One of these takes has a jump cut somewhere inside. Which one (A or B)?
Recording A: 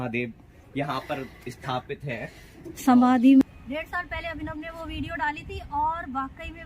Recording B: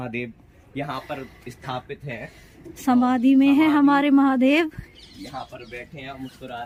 A